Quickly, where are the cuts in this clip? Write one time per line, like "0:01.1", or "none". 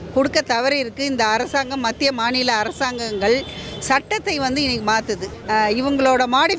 0:05.3